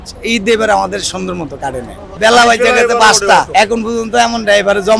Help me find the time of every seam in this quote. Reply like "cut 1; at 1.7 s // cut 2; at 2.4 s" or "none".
cut 1; at 2.1 s // cut 2; at 3.5 s

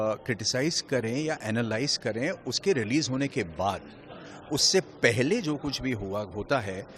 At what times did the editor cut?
none

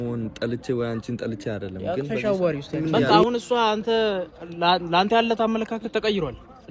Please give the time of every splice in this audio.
cut 1; at 3.1 s

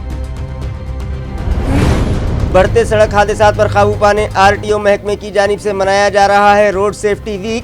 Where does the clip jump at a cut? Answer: cut 1; at 2.3 s

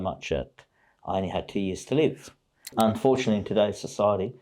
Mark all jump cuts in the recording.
cut 1; at 2.7 s

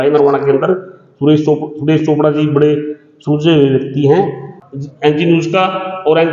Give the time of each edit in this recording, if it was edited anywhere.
cut 1; at 4.5 s

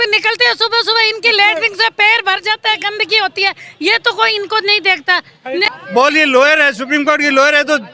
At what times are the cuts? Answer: cut 1; at 5.7 s

